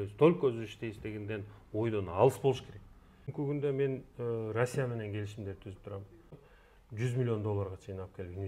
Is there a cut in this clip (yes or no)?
yes